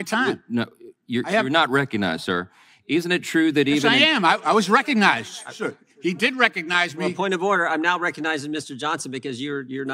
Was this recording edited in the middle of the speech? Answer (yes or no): no